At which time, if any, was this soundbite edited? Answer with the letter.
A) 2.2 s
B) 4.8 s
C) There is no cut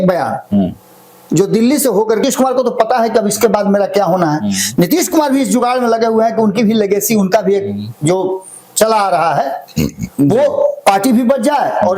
A